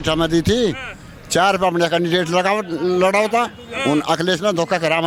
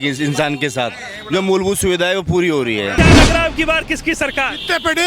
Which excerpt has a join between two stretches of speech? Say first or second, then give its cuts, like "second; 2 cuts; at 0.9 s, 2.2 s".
second; 1 cut; at 2.9 s